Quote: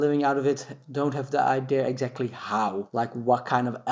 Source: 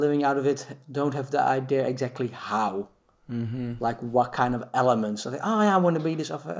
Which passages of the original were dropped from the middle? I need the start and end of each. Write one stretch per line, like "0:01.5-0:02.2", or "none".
0:02.9-0:03.8